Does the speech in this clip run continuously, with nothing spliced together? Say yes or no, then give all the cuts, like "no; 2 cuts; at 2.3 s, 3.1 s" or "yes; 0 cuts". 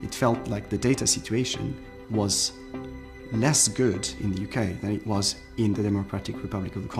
yes; 0 cuts